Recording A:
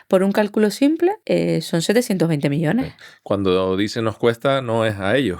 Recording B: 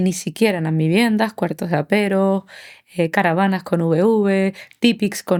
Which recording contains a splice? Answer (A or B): A